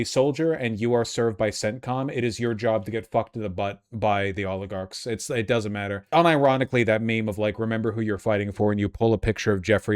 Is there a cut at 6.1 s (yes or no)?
yes